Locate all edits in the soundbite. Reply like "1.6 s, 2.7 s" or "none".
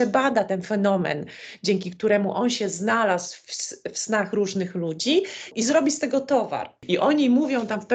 5.5 s, 6.7 s